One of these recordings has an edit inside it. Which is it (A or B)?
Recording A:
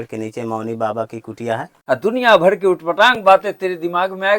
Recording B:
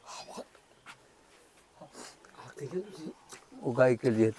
A